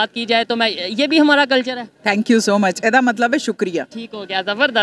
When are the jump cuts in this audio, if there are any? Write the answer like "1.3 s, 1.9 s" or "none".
none